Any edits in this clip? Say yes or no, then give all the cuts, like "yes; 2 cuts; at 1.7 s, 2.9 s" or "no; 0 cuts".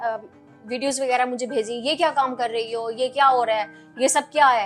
no; 0 cuts